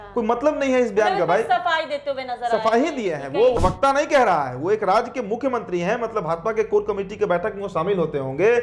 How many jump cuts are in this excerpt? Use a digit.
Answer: 1